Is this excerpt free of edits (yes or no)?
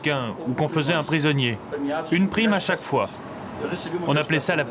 yes